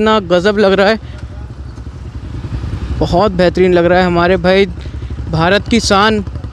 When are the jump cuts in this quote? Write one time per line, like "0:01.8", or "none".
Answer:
none